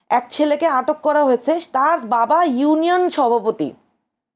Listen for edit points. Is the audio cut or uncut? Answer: uncut